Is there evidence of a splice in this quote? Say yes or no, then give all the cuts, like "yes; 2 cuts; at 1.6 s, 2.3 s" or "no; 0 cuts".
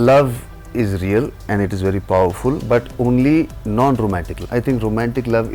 yes; 2 cuts; at 2.6 s, 4.3 s